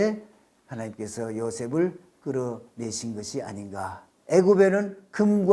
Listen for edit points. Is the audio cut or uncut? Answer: cut